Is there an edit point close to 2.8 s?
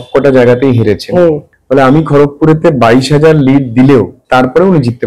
no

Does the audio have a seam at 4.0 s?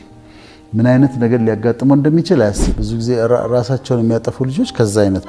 no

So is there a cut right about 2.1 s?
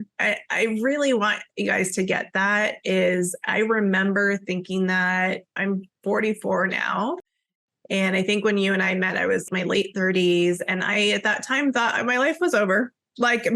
no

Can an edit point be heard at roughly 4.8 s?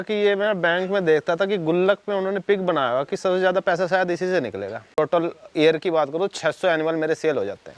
yes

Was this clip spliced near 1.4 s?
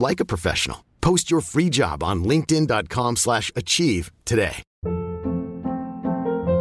no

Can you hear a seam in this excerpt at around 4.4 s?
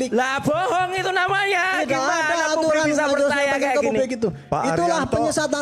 no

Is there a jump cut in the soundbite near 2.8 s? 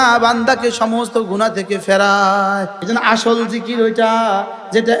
yes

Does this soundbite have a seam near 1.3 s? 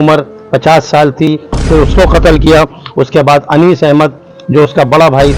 yes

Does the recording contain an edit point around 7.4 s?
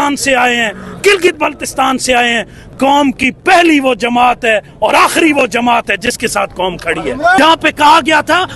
yes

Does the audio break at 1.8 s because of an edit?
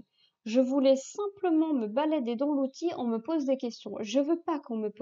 no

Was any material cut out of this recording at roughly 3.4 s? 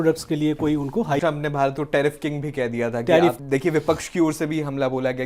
yes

